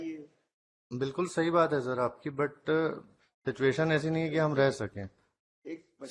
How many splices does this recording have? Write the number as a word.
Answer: zero